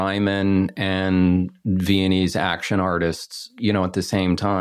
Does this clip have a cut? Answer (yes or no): yes